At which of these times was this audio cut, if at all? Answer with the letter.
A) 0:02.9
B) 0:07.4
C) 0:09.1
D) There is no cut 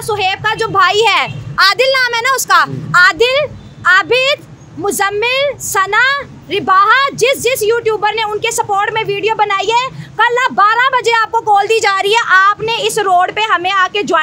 D